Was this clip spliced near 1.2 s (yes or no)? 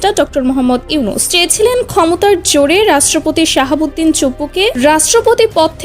yes